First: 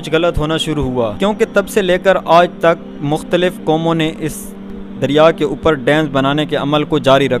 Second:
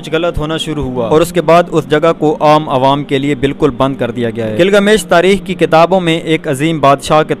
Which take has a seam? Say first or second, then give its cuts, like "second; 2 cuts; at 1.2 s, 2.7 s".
second; 2 cuts; at 1.1 s, 4.5 s